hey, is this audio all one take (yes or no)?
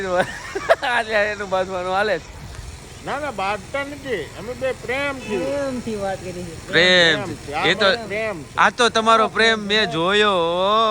yes